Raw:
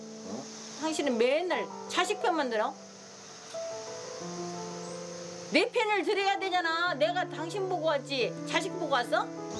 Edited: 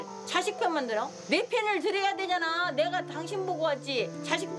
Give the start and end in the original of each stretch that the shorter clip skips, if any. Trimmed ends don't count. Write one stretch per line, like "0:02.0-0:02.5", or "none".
0:02.8-0:05.4